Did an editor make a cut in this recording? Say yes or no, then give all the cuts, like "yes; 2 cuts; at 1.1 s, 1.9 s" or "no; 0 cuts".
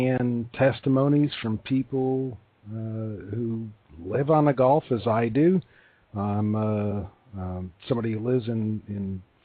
yes; 1 cut; at 1.8 s